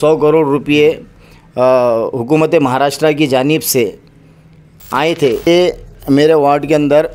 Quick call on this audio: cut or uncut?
cut